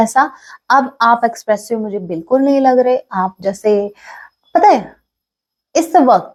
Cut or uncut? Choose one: uncut